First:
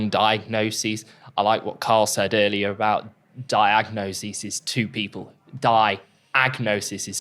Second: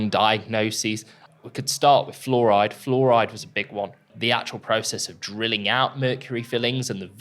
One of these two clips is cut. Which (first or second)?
second